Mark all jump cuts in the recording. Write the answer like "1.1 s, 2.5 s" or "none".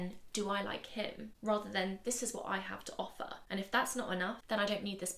1.3 s, 3.4 s, 4.4 s